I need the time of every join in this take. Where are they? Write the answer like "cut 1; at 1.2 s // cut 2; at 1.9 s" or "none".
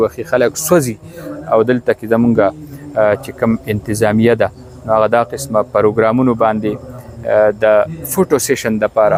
none